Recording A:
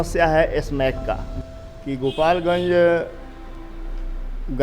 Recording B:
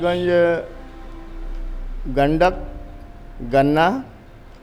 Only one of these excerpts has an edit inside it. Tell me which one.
A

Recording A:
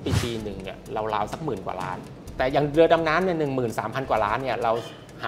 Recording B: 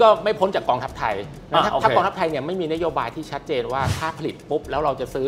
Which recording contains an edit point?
A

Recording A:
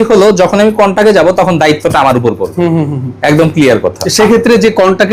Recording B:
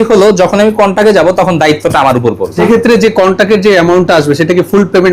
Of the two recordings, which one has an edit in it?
B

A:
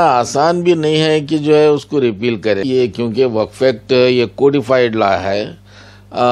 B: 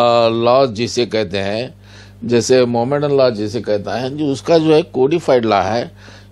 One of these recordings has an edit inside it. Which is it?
A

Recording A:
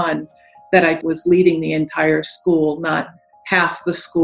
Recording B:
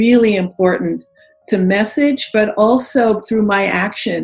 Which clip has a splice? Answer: A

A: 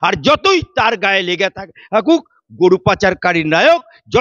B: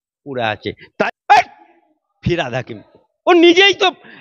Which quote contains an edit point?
B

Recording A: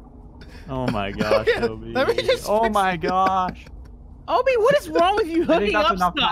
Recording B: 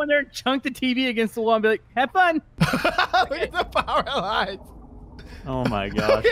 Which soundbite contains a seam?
B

